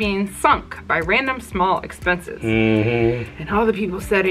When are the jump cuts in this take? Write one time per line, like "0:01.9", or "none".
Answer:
none